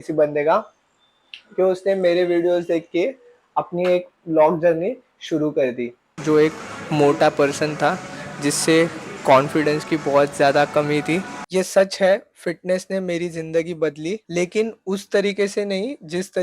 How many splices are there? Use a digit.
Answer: 2